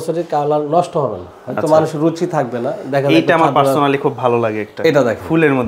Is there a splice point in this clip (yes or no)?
no